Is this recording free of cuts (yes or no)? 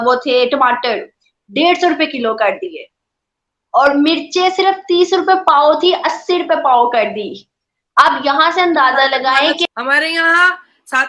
no